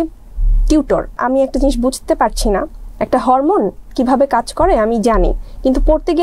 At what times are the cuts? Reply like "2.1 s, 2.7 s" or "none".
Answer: 1.2 s